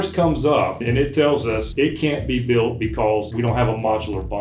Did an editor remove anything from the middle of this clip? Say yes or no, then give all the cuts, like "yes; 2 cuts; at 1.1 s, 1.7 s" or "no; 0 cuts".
yes; 3 cuts; at 0.8 s, 1.7 s, 3.3 s